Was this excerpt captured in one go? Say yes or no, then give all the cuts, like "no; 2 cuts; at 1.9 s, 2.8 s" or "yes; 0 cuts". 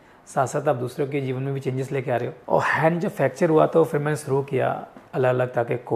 no; 2 cuts; at 2.4 s, 4.9 s